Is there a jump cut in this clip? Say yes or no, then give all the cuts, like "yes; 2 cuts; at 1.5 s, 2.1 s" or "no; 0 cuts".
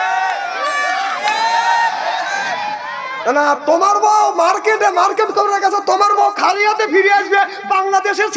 no; 0 cuts